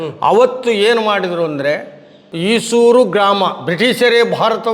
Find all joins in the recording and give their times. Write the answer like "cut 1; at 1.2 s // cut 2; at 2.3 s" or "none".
cut 1; at 2.3 s